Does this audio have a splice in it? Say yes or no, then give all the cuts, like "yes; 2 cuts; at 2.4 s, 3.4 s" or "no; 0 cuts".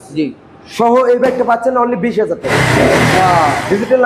yes; 1 cut; at 2.5 s